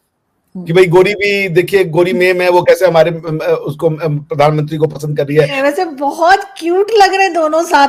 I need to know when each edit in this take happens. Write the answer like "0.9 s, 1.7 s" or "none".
5.6 s